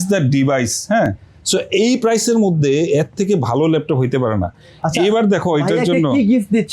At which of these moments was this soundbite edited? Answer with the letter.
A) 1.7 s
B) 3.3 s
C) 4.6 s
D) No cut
D